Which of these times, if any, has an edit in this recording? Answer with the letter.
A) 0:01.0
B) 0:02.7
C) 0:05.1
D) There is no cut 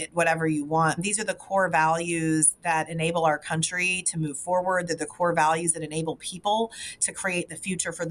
A